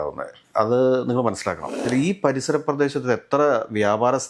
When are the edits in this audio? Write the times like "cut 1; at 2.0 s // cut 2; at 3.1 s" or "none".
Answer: cut 1; at 1.8 s

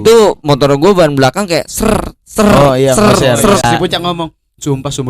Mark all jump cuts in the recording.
cut 1; at 3.6 s

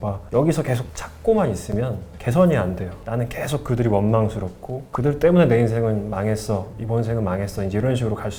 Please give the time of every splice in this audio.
none

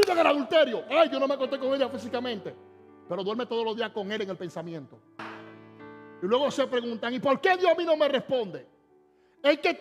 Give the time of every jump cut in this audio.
cut 1; at 5.3 s

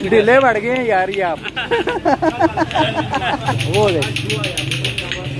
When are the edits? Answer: cut 1; at 3.6 s

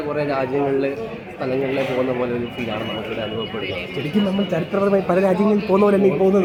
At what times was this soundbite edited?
none

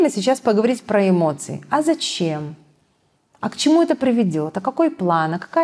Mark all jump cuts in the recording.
none

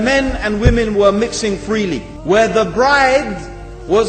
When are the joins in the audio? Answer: cut 1; at 2.1 s

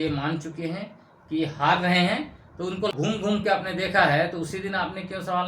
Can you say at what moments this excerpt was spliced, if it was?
cut 1; at 2.9 s

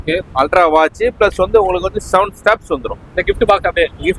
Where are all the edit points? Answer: none

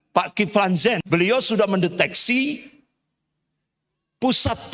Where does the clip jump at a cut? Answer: cut 1; at 1.0 s

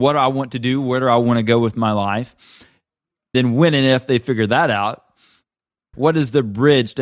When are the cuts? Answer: none

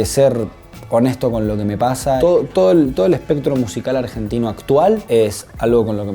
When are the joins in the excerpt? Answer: cut 1; at 2.2 s // cut 2; at 5.0 s

